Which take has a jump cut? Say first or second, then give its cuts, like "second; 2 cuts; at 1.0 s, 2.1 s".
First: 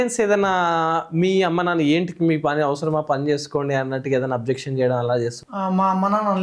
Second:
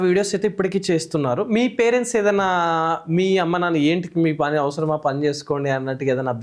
first; 1 cut; at 5.4 s